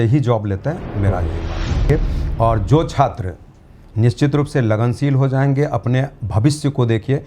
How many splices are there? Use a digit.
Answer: 1